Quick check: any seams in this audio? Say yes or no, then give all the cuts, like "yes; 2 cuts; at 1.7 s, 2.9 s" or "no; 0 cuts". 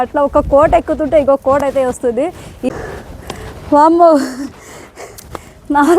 yes; 1 cut; at 2.7 s